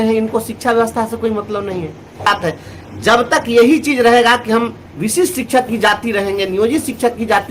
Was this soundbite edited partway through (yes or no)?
yes